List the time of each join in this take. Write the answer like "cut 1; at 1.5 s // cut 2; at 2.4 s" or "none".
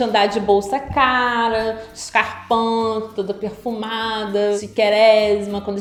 none